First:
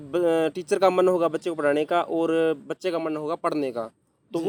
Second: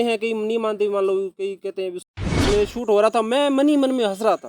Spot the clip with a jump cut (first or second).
second